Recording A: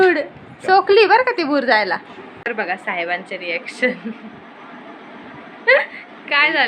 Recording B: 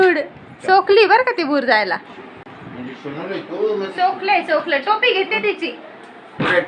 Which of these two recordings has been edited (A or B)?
A